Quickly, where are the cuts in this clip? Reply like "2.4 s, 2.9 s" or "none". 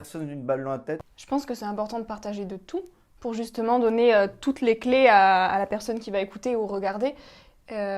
1.0 s